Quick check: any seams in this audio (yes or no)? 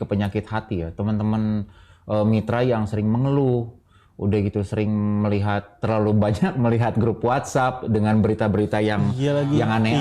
no